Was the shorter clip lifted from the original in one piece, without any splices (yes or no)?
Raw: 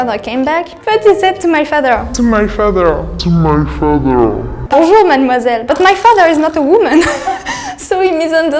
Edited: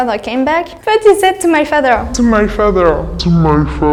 yes